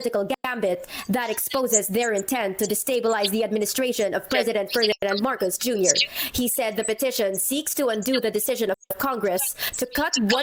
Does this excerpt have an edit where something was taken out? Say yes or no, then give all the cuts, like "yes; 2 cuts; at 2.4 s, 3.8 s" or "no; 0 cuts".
no; 0 cuts